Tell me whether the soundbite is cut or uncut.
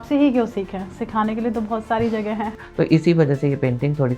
cut